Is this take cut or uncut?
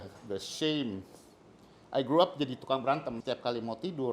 cut